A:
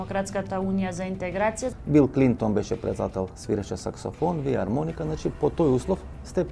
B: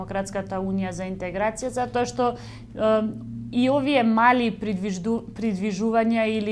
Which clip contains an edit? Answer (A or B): A